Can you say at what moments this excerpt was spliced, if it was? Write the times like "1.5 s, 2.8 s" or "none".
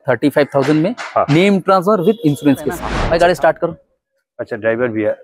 2.9 s

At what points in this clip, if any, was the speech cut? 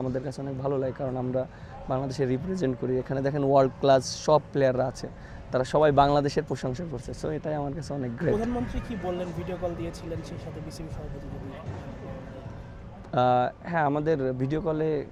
none

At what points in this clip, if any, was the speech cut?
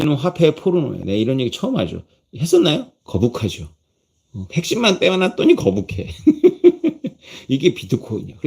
2.9 s

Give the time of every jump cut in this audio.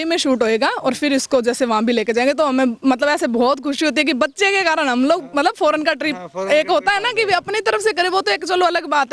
none

